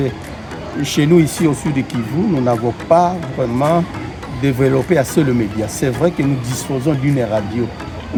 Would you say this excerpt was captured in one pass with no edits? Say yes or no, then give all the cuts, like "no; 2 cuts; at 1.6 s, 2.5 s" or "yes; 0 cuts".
yes; 0 cuts